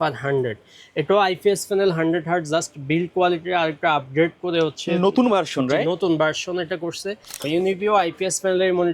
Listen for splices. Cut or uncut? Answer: cut